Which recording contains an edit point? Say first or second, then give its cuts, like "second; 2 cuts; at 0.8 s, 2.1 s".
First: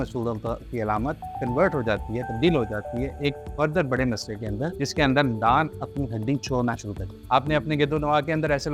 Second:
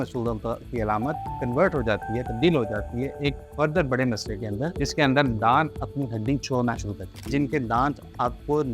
second; 1 cut; at 7.2 s